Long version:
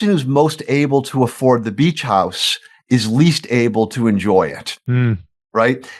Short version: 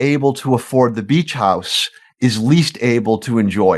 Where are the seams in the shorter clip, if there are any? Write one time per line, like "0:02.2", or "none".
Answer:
none